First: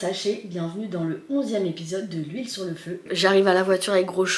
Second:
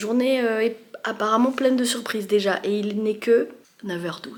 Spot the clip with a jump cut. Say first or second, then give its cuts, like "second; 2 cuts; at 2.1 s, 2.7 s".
first; 1 cut; at 3.0 s